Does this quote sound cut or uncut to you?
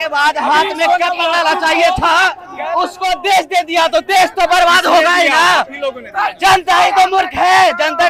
uncut